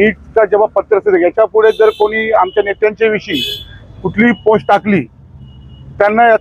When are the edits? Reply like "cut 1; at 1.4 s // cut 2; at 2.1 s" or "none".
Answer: none